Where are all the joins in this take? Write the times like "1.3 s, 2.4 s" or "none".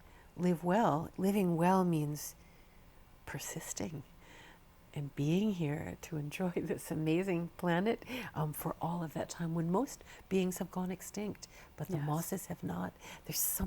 1.1 s